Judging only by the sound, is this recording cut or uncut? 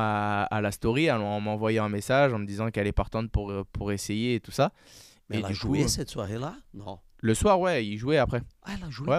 uncut